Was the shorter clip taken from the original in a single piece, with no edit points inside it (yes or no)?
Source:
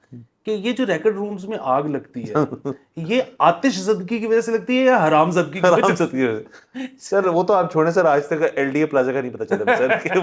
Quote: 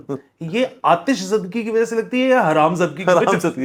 yes